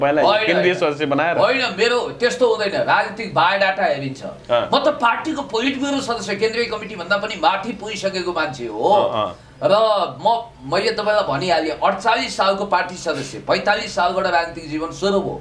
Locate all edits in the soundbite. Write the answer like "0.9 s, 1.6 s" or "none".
none